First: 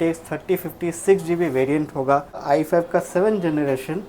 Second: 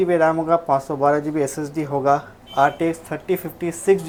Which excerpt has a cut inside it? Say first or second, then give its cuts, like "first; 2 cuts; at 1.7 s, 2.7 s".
first; 1 cut; at 2.4 s